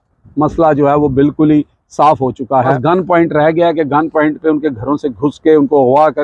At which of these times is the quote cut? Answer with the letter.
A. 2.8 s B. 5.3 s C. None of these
A